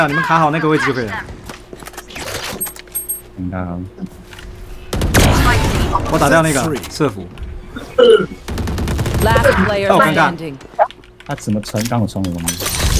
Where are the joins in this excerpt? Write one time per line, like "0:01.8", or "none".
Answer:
0:01.5
0:07.3